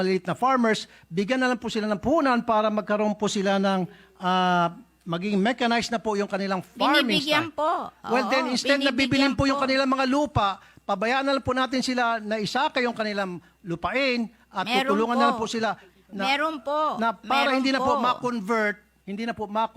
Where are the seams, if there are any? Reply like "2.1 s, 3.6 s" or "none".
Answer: none